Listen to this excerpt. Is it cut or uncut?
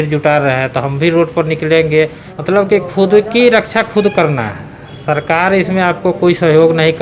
cut